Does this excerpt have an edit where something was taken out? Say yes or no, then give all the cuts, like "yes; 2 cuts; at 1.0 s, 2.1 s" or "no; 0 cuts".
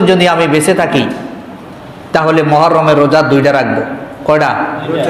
no; 0 cuts